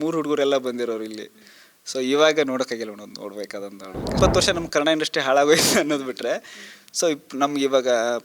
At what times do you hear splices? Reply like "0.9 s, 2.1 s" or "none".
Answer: 4.1 s